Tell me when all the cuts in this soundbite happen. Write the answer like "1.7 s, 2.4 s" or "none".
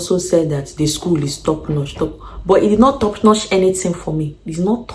none